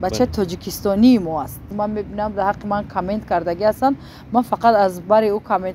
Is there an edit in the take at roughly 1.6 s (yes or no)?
yes